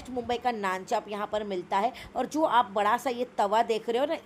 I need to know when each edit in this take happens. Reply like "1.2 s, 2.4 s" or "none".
none